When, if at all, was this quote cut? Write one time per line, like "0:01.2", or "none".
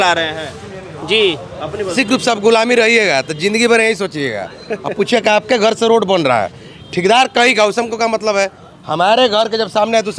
0:01.9